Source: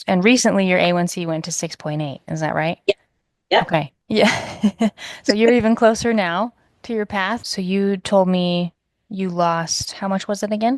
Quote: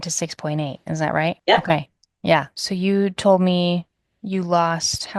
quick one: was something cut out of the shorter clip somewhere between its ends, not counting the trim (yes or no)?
yes